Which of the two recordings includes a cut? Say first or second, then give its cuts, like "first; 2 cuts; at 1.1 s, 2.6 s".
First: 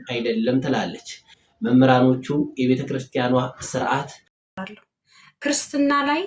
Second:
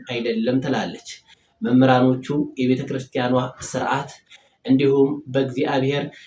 first; 1 cut; at 4.5 s